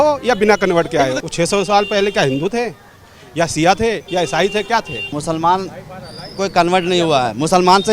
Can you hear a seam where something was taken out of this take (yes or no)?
yes